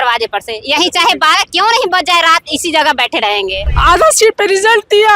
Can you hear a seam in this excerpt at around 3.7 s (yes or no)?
yes